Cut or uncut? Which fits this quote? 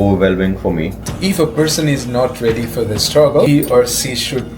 cut